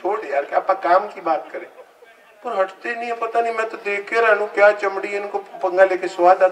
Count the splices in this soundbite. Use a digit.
0